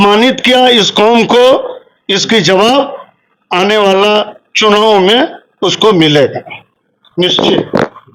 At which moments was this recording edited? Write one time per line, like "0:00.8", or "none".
none